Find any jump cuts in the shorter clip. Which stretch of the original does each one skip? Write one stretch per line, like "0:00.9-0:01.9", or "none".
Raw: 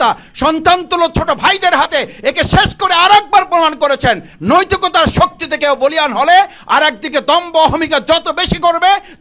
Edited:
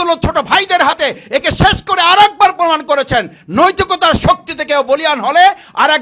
none